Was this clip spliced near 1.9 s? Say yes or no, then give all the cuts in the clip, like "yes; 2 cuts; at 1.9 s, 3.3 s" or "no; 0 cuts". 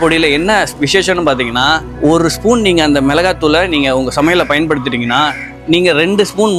yes; 1 cut; at 1.9 s